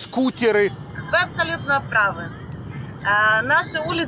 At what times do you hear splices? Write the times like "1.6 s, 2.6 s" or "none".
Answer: none